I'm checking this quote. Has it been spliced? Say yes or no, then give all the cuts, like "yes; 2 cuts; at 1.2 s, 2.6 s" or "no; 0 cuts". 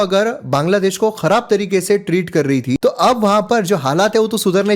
yes; 1 cut; at 2.8 s